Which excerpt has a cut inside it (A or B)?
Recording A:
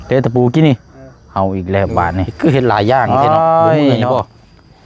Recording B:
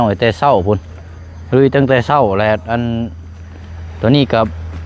A